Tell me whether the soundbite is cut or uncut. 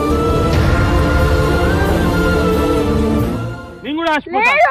uncut